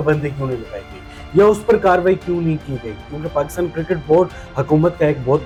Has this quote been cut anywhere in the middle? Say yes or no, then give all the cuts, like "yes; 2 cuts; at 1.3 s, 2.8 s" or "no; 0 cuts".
no; 0 cuts